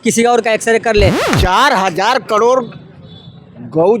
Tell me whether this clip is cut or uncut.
cut